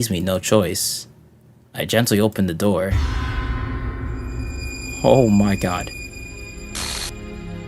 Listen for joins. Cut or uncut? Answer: uncut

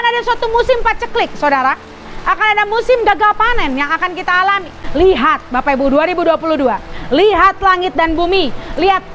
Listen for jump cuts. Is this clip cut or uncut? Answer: cut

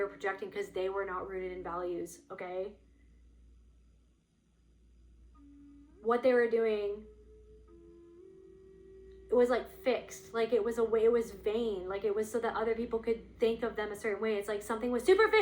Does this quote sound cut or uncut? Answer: cut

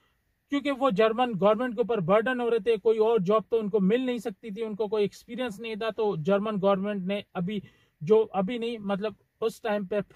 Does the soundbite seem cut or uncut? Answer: uncut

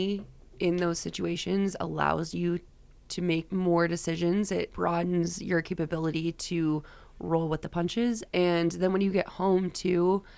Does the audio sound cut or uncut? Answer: cut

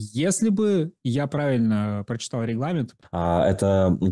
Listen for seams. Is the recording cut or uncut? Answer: cut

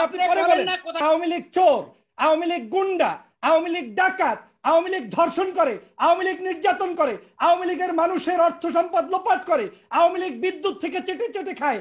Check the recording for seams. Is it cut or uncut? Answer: cut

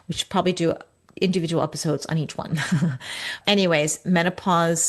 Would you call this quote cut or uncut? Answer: cut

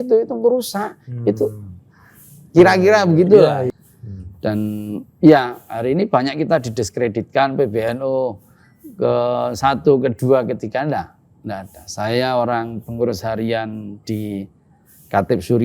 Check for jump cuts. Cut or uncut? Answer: cut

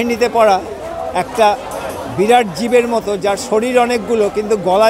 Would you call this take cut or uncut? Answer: uncut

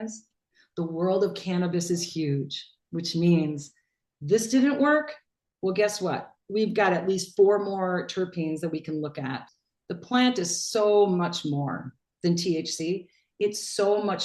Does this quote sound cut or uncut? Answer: cut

